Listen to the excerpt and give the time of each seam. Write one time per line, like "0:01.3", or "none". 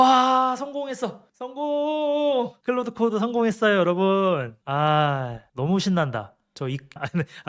none